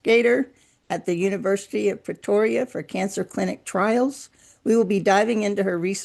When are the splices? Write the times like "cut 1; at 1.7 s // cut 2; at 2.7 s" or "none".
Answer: none